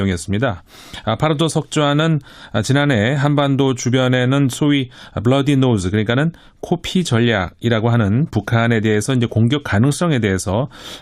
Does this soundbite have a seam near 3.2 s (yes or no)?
no